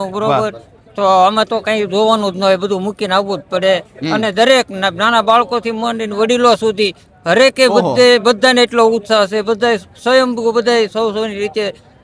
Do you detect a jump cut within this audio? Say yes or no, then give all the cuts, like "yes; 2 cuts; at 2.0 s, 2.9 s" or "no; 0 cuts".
no; 0 cuts